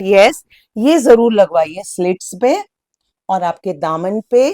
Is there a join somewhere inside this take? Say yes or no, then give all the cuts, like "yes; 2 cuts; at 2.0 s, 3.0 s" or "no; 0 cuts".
no; 0 cuts